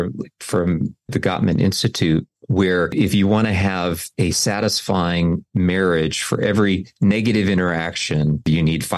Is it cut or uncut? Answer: cut